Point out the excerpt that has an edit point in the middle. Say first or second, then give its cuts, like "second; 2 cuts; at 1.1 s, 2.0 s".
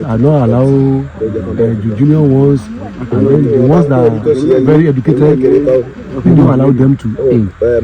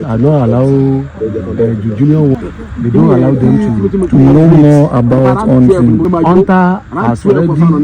second; 2 cuts; at 2.3 s, 6.1 s